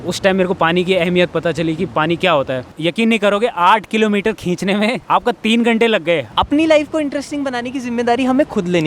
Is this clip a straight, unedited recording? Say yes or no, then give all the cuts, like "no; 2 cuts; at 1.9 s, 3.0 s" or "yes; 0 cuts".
no; 3 cuts; at 2.7 s, 5.0 s, 6.3 s